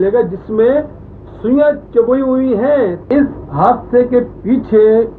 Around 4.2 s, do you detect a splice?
no; 1 cut; at 3.0 s

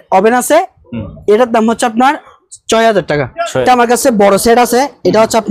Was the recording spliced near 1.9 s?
no; 1 cut; at 3.6 s

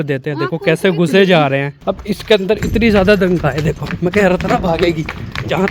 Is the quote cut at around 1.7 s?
yes; 1 cut; at 1.7 s

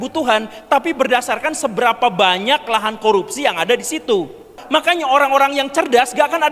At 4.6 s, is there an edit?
yes; 1 cut; at 4.6 s

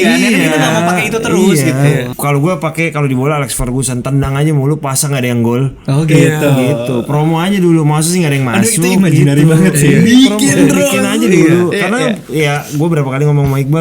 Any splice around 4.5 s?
no; 1 cut; at 2.1 s

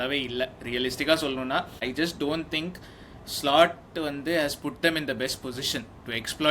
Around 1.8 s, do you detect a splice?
yes; 1 cut; at 1.8 s

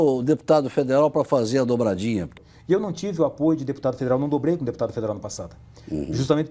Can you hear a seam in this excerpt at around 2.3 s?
yes; 1 cut; at 2.3 s

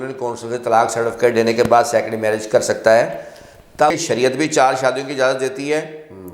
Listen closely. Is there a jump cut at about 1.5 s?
no; 1 cut; at 3.9 s

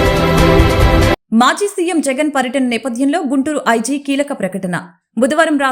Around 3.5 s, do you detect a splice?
no; 1 cut; at 1.2 s

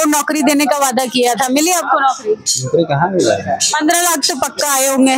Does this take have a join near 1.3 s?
no; 0 cuts

